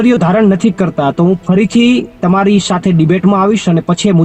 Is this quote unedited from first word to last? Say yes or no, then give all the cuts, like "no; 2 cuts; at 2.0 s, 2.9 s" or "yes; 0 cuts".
yes; 0 cuts